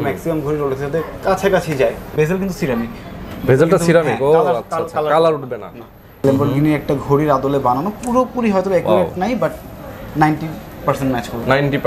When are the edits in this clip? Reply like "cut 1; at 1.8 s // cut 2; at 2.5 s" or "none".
cut 1; at 2.1 s // cut 2; at 6.2 s